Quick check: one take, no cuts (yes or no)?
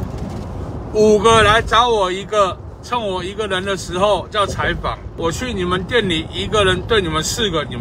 no